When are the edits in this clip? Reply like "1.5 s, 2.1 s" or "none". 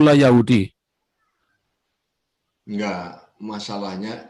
none